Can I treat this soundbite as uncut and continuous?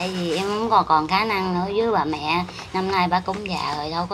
yes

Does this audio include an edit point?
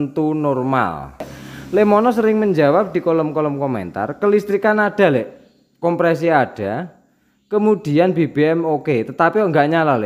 yes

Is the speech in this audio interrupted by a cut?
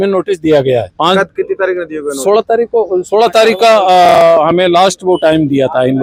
no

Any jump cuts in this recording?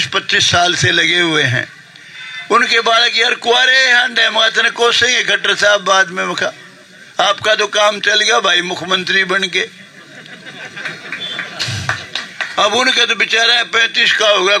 no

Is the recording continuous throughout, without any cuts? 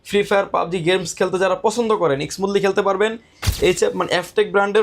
no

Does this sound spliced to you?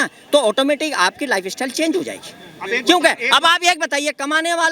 no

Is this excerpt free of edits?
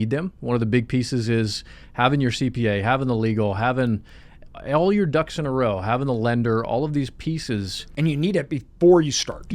no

